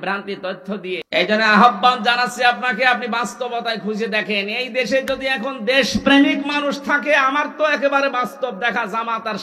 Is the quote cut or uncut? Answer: cut